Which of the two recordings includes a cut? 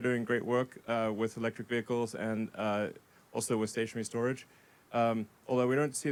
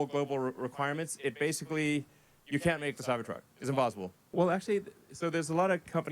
second; 1 cut; at 4.1 s

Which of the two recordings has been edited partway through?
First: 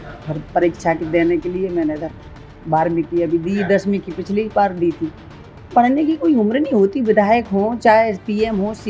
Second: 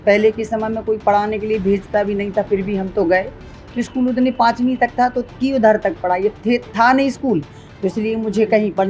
first; 1 cut; at 5.7 s

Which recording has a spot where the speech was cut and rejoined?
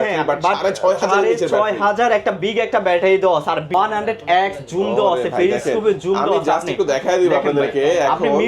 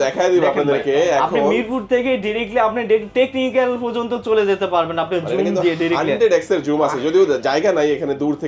first; 1 cut; at 3.7 s

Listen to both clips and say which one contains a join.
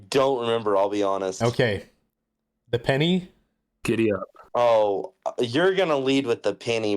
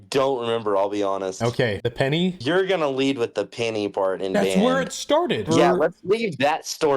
second; 2 cuts; at 2.4 s, 5.5 s

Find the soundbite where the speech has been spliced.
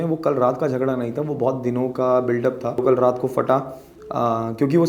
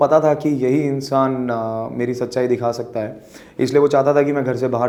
first; 1 cut; at 2.8 s

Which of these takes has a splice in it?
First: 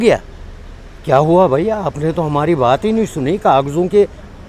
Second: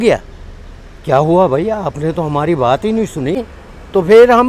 second; 1 cut; at 3.4 s

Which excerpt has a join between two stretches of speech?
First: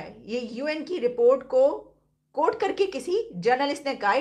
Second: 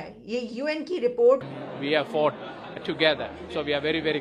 second; 1 cut; at 1.4 s

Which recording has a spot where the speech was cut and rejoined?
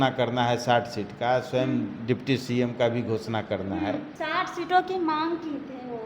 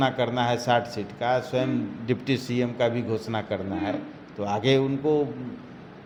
first; 1 cut; at 4.1 s

